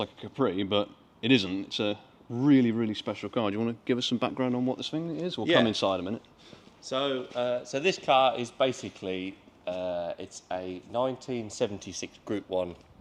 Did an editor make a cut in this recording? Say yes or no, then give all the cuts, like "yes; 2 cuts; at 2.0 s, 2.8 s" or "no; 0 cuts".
no; 0 cuts